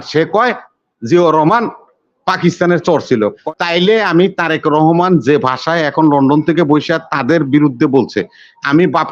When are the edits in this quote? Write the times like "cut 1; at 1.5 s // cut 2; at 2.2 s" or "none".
cut 1; at 3.4 s